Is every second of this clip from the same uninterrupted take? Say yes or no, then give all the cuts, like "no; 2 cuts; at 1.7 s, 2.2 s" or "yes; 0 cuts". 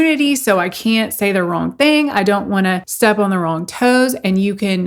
yes; 0 cuts